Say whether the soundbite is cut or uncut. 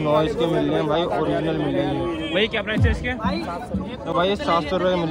uncut